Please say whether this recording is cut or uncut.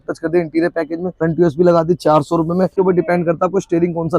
cut